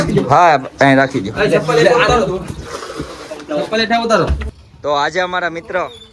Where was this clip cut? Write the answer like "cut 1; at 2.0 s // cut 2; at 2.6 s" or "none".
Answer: cut 1; at 4.4 s